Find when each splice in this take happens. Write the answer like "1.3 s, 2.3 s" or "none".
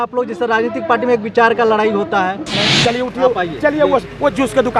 2.5 s